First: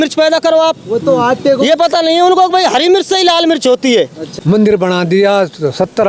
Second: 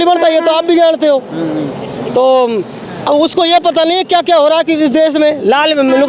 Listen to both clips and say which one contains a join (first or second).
first